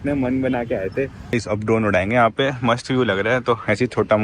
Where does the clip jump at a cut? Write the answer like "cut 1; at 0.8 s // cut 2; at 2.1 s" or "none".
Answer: cut 1; at 1.2 s